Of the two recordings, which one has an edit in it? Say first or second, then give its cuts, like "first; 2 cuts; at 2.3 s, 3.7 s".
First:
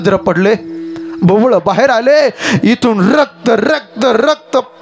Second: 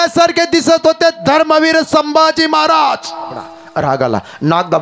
second; 1 cut; at 3.6 s